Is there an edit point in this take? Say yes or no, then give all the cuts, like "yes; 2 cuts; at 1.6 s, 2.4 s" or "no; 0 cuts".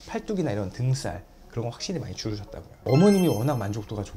no; 0 cuts